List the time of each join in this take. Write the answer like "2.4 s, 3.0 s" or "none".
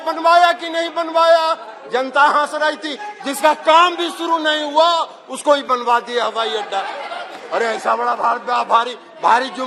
none